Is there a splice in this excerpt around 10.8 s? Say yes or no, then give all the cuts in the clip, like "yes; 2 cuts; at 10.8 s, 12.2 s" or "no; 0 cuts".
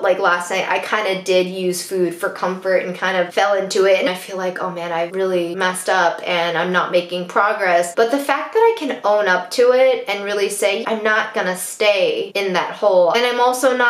yes; 4 cuts; at 4.1 s, 5.6 s, 10.8 s, 13.1 s